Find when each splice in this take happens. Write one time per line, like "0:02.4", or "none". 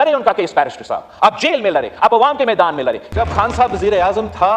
0:03.1